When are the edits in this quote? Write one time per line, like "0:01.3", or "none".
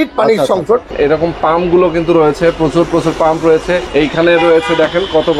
0:00.9
0:03.9